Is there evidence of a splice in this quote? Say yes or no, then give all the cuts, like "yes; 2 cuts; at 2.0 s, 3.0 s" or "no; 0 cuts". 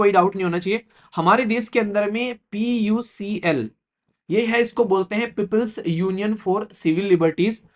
no; 0 cuts